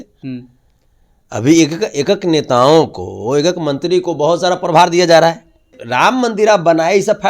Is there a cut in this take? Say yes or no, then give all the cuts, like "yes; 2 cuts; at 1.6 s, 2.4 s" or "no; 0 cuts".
yes; 1 cut; at 5.8 s